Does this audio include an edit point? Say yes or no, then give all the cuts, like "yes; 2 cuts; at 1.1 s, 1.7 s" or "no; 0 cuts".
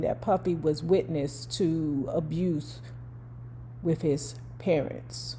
no; 0 cuts